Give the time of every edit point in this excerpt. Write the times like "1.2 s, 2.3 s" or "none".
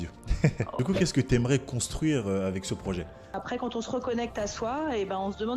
0.8 s, 3.4 s